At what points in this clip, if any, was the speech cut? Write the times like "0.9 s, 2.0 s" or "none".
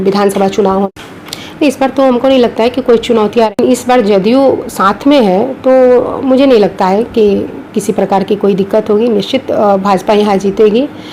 0.9 s, 3.5 s